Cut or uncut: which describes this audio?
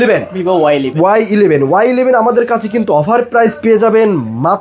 uncut